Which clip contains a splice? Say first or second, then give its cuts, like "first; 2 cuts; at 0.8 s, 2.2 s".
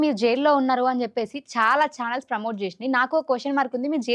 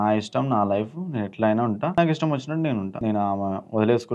second; 2 cuts; at 1.9 s, 2.9 s